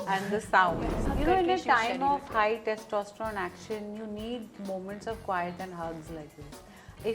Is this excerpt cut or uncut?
cut